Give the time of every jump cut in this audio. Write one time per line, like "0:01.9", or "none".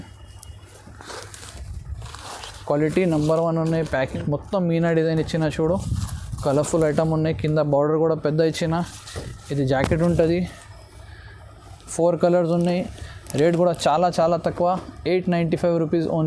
none